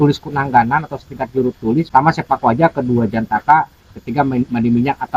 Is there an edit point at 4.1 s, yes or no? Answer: no